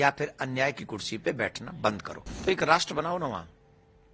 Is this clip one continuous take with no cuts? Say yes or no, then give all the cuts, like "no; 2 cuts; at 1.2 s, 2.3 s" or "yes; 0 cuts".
no; 1 cut; at 2.4 s